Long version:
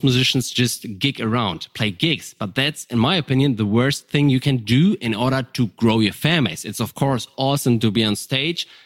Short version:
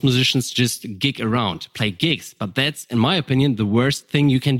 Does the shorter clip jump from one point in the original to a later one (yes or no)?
no